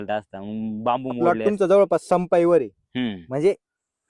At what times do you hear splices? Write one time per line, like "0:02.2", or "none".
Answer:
0:01.2

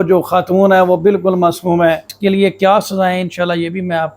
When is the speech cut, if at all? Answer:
0:02.1

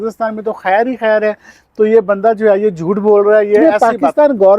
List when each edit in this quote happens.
0:03.6

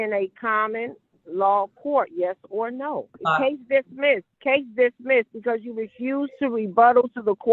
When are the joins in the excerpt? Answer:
0:03.1
0:04.3

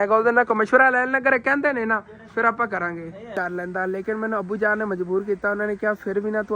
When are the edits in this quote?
0:03.4

